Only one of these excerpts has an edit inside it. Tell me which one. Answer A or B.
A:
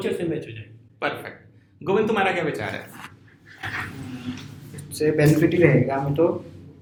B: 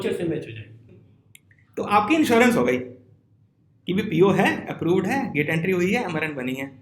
B